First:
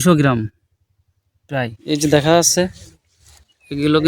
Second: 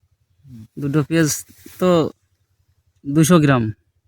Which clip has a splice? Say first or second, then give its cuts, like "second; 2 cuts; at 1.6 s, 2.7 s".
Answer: first; 1 cut; at 1.8 s